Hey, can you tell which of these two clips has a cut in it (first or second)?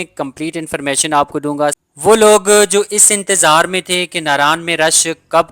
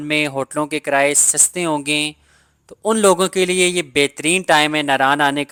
first